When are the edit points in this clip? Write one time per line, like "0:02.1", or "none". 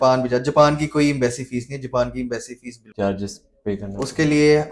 0:02.8